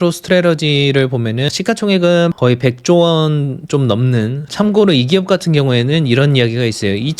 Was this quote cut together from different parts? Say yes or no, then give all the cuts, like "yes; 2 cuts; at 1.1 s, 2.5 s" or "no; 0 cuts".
yes; 3 cuts; at 1.5 s, 2.4 s, 4.4 s